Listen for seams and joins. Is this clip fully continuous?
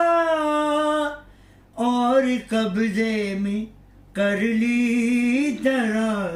yes; 0 cuts

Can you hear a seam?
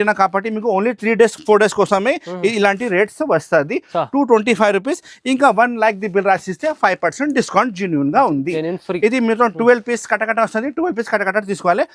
no; 0 cuts

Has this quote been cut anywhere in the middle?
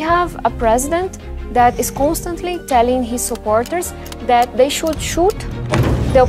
no; 0 cuts

